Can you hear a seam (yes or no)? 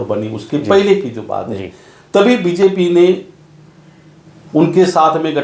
no